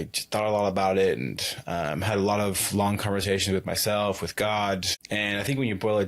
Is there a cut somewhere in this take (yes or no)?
yes